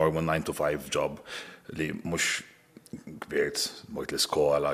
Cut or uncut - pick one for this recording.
uncut